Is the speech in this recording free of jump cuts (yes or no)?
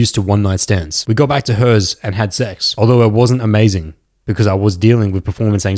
no